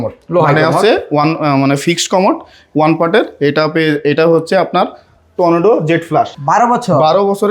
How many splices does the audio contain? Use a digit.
1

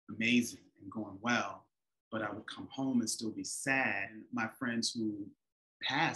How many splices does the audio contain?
1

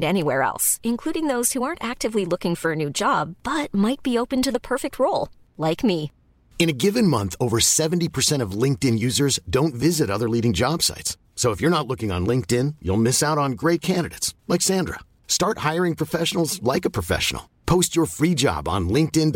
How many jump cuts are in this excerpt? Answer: 0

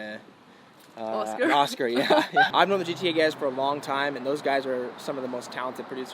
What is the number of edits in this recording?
1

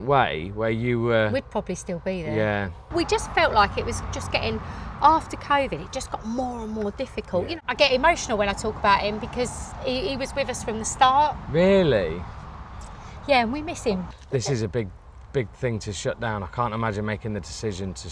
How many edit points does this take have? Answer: 3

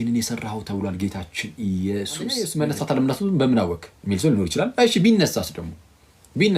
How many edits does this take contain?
1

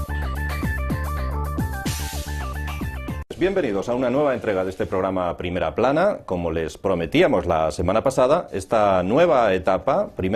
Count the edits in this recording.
0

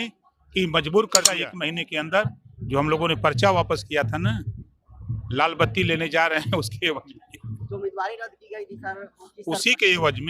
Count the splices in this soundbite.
1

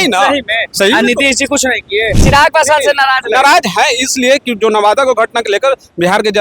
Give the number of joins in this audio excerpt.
1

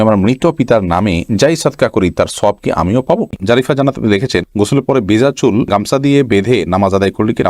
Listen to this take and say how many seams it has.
1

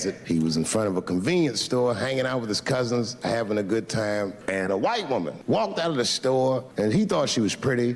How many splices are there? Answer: 0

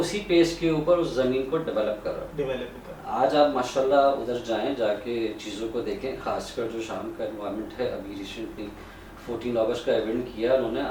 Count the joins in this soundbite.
0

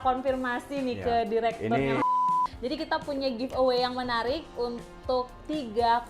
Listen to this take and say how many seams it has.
1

